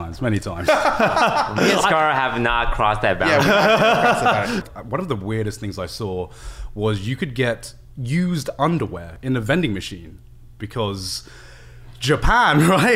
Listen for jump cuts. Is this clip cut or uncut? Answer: cut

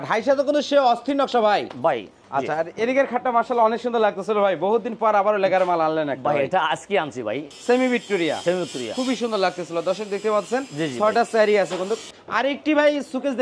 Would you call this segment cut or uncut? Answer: cut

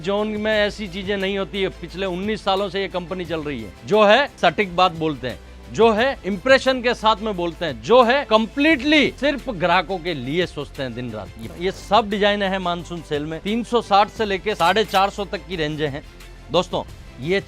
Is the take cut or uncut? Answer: cut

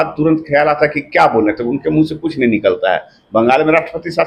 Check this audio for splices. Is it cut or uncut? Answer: uncut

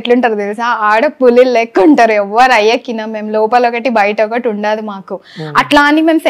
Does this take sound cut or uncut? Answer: uncut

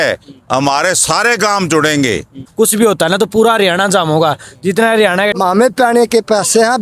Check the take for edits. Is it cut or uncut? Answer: cut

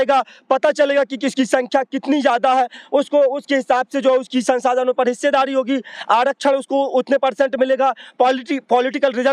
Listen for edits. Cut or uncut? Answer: uncut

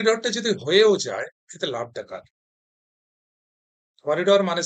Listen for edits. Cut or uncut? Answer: uncut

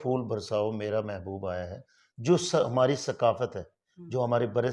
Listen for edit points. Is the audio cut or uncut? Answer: uncut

